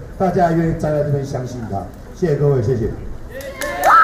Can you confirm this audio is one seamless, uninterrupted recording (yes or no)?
yes